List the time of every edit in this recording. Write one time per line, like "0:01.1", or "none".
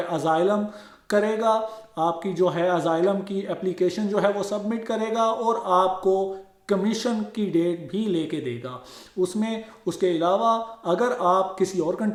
none